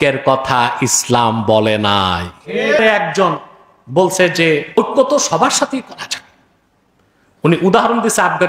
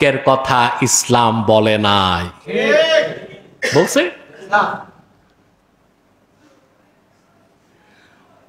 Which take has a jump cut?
first; 2 cuts; at 2.8 s, 4.8 s

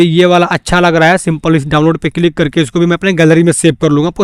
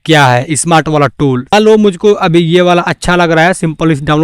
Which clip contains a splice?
second; 1 cut; at 1.5 s

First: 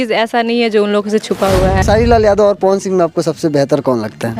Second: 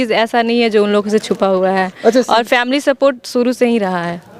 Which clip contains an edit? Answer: first; 1 cut; at 1.8 s

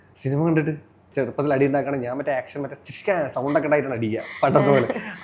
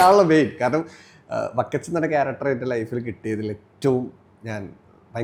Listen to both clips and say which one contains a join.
first; 1 cut; at 1.1 s

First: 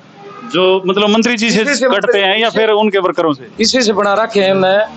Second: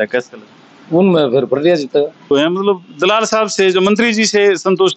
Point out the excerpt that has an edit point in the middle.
second; 1 cut; at 2.3 s

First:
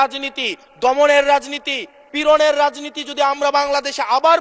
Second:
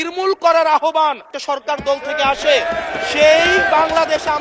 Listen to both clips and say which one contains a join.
second; 1 cut; at 1.3 s

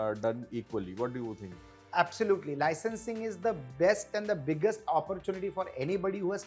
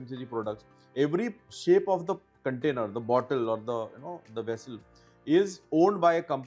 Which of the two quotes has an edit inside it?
second; 1 cut; at 1.5 s

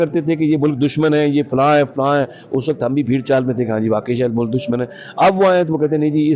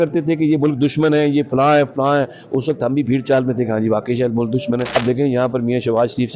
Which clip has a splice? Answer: second; 1 cut; at 5.0 s

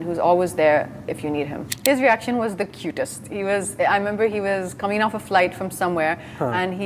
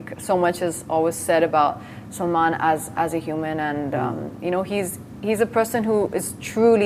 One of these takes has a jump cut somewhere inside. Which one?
first; 1 cut; at 1.6 s

